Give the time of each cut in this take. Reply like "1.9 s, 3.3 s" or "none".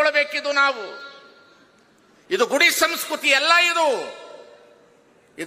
none